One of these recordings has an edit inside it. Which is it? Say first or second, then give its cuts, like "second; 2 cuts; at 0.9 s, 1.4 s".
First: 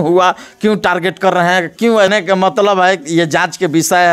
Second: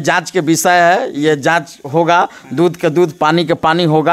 first; 1 cut; at 2.1 s